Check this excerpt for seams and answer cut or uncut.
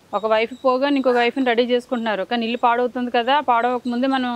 uncut